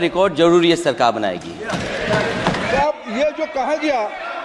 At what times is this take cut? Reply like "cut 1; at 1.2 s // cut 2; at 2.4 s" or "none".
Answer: cut 1; at 2.7 s